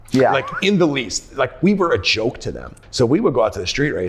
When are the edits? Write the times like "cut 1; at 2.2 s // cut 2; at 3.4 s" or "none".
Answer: cut 1; at 2.8 s